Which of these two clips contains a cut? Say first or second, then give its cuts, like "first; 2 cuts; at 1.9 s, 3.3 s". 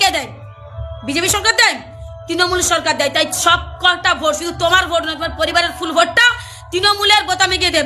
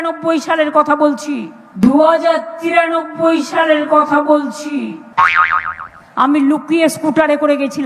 second; 1 cut; at 4.9 s